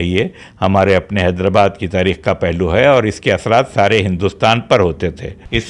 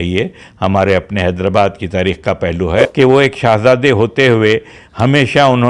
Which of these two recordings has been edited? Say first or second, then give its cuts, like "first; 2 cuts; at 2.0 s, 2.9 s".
second; 1 cut; at 2.9 s